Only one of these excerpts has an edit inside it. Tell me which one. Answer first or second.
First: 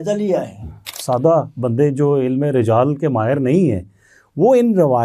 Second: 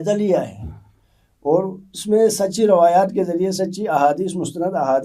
first